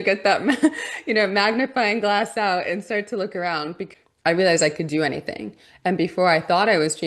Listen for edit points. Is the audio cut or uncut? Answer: cut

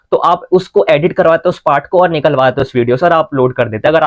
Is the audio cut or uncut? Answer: uncut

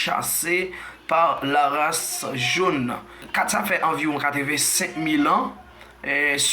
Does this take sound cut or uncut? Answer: cut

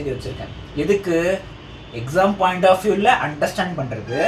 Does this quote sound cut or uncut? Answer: uncut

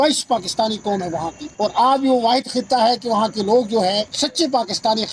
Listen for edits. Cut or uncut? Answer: cut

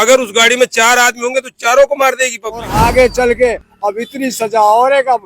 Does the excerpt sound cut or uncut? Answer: cut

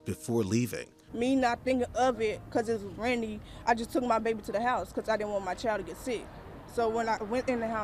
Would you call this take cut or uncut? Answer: uncut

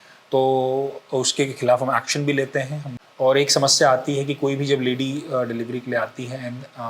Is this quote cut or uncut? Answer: cut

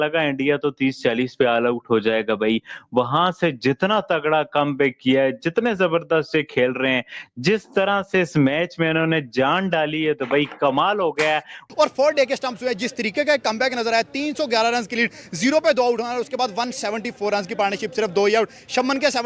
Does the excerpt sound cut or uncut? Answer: uncut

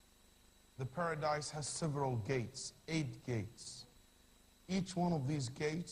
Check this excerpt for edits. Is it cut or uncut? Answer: cut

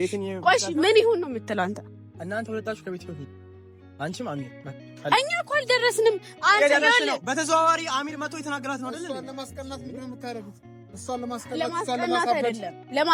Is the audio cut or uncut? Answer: uncut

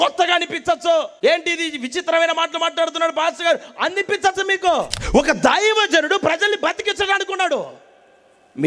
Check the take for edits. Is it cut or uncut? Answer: cut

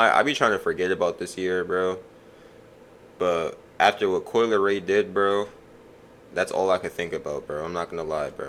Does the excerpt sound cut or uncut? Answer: uncut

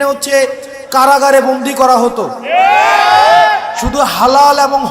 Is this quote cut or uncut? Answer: uncut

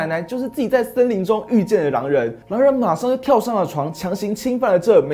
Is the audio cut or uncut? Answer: cut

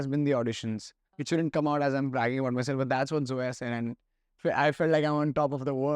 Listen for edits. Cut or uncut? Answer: cut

